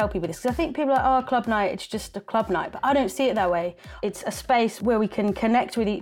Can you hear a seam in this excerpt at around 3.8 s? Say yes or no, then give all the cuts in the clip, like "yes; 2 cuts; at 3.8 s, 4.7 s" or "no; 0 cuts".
yes; 2 cuts; at 3.8 s, 4.8 s